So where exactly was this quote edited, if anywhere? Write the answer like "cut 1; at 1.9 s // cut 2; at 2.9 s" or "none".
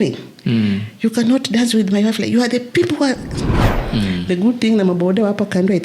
cut 1; at 3.8 s